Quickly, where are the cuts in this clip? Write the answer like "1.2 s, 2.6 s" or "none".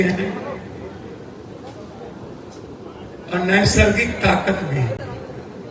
none